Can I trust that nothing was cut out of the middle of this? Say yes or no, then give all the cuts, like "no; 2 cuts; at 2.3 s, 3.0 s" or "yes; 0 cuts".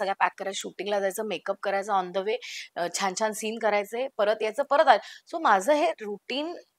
yes; 0 cuts